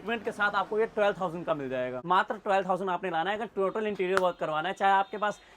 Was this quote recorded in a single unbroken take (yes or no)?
no